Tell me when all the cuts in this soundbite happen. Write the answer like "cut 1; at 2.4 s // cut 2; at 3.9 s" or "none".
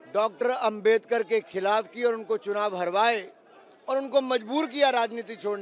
none